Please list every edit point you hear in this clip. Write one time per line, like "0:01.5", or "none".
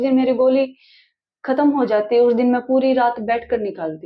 none